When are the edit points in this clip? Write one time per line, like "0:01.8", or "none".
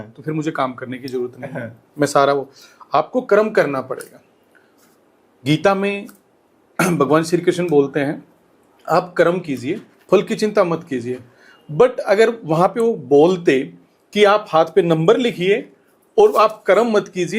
none